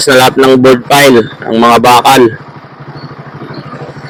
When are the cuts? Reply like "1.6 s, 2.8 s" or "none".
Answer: none